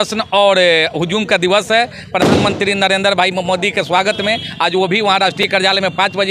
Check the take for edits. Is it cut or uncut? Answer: uncut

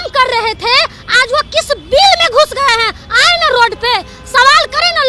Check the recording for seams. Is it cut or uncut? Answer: uncut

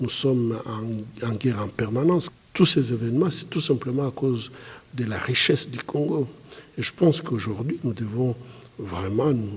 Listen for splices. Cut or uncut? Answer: cut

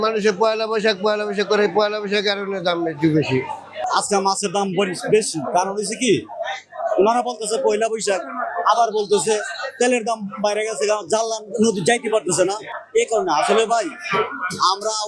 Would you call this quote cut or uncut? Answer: uncut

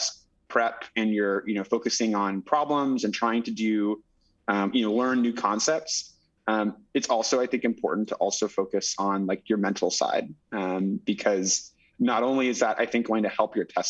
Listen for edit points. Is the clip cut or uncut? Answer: uncut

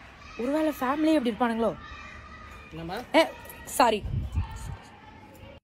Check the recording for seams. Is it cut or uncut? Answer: uncut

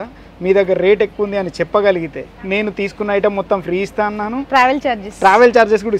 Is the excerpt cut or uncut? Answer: uncut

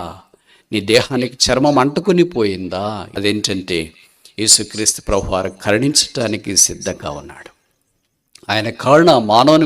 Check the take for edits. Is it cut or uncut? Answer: cut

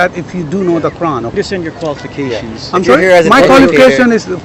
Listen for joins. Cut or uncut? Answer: cut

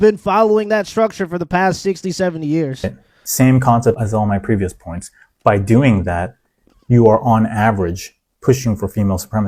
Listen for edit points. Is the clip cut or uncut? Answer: uncut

